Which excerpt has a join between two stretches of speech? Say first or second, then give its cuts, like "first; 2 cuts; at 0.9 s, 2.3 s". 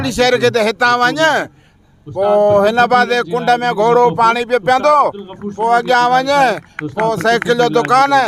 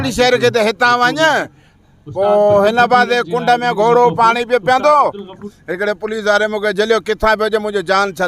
second; 1 cut; at 5.4 s